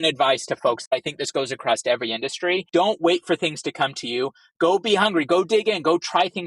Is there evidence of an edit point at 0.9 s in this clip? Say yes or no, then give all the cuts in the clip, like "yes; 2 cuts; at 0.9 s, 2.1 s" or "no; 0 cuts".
yes; 2 cuts; at 0.9 s, 2.7 s